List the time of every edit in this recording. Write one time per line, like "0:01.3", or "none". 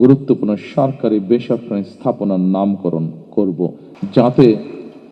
0:03.9